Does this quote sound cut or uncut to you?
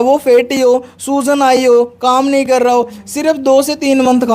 uncut